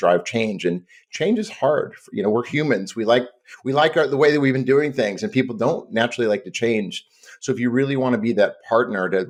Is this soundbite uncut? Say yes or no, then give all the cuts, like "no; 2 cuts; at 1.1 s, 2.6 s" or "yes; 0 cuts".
yes; 0 cuts